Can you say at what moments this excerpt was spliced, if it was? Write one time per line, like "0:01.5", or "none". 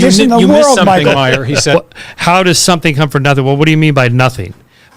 0:01.7